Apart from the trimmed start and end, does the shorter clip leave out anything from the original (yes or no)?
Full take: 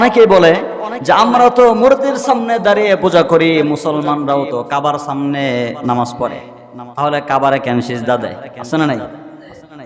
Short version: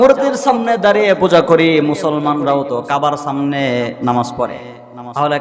no